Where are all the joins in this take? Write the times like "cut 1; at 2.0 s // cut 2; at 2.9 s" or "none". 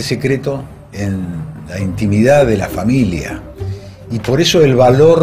cut 1; at 1.9 s

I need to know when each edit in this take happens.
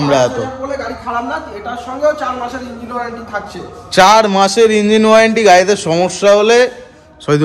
none

